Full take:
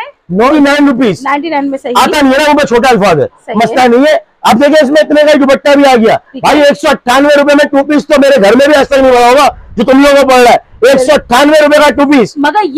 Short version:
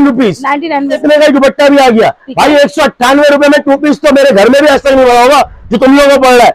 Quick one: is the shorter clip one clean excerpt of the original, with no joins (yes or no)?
no